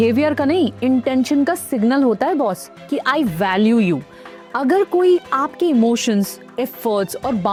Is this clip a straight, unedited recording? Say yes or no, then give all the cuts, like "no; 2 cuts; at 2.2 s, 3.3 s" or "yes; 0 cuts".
yes; 0 cuts